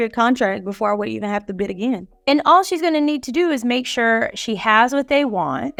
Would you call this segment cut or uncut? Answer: uncut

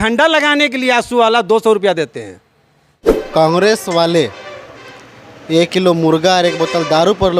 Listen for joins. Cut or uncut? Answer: cut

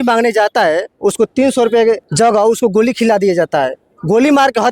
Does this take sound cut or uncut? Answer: cut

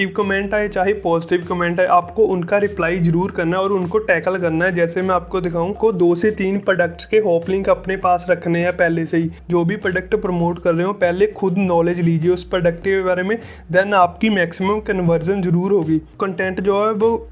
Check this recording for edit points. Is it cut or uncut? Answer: cut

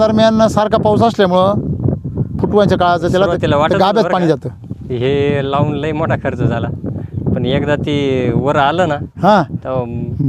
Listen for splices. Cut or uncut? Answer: uncut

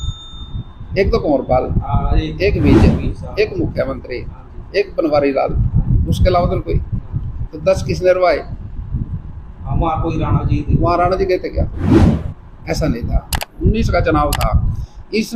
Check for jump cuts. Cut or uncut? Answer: cut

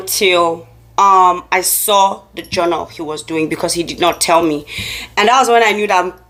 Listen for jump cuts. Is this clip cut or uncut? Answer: uncut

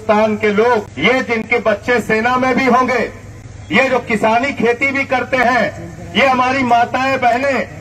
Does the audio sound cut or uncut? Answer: cut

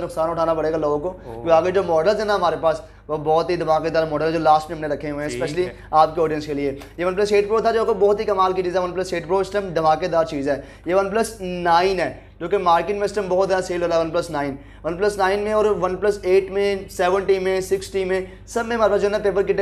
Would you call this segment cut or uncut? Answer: uncut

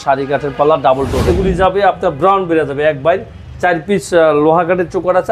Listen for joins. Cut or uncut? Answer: cut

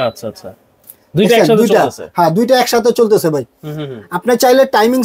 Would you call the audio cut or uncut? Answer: uncut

